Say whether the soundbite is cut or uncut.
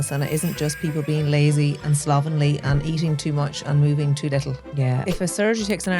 cut